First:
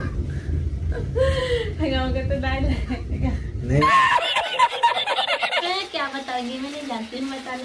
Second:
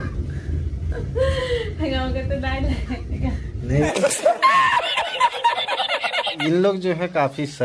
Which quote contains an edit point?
first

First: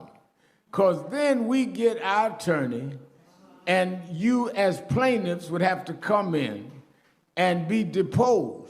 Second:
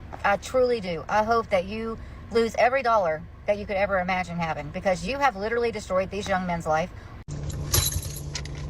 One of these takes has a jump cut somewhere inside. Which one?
second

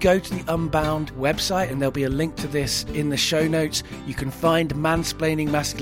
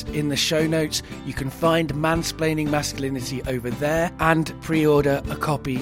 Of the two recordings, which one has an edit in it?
second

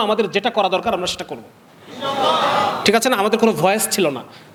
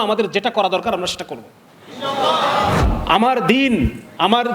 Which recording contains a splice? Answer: second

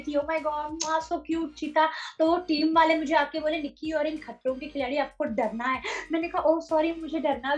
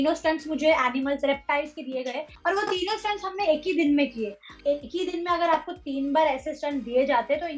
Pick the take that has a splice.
second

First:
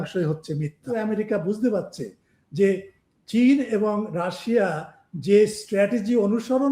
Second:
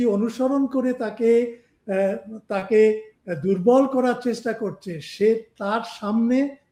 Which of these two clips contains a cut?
first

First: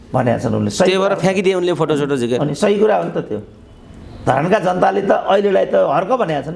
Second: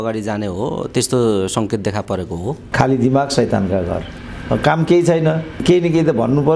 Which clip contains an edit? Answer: second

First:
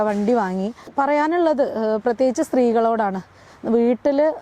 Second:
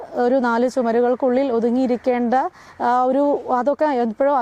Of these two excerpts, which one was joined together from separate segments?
first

